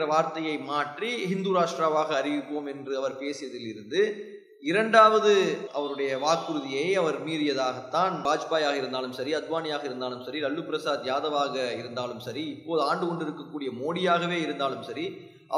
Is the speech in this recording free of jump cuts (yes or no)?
no